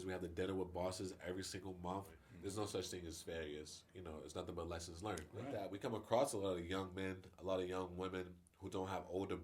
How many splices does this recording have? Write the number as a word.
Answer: two